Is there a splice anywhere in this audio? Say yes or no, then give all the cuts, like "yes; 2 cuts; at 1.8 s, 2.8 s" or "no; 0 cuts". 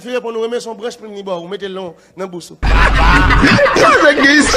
yes; 1 cut; at 2.5 s